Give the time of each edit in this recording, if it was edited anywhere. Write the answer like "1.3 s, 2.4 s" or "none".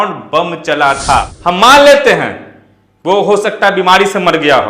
1.1 s